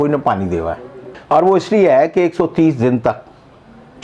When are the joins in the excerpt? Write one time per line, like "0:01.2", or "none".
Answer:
none